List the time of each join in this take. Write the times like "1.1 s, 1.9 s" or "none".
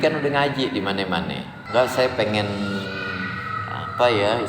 1.5 s